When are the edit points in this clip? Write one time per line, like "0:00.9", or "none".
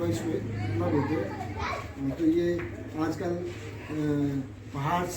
none